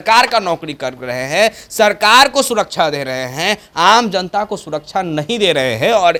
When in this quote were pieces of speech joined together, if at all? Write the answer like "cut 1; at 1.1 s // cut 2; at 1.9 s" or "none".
none